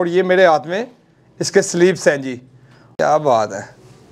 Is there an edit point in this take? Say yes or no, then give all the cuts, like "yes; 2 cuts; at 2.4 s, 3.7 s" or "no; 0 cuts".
yes; 1 cut; at 3.0 s